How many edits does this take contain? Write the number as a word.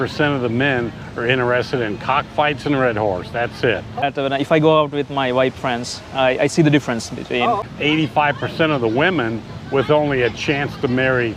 two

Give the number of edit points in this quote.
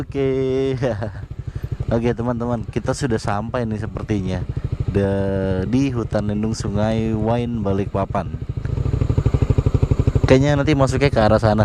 one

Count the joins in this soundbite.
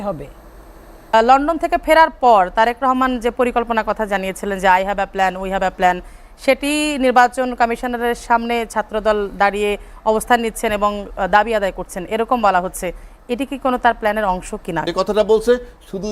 two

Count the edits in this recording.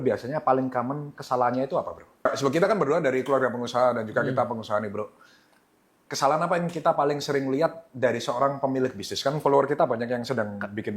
one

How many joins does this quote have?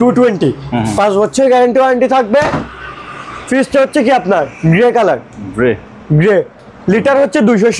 zero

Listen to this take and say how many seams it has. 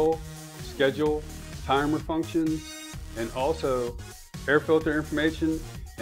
zero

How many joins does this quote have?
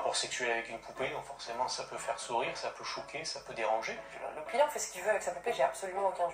one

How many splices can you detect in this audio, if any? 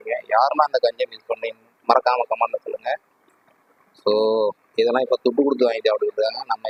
zero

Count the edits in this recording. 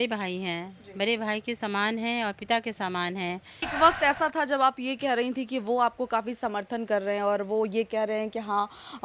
one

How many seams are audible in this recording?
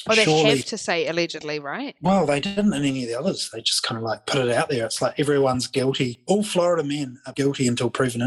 zero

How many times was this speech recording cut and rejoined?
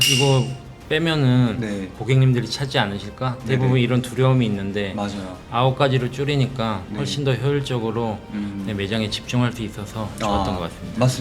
one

